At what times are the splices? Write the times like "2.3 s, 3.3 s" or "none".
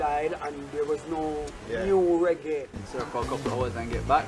2.8 s